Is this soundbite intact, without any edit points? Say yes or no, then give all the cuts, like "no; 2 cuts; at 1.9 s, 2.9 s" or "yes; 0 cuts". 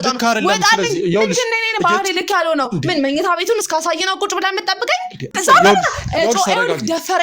no; 1 cut; at 5.3 s